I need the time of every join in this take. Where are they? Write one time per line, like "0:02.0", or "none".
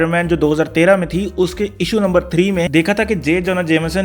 0:02.7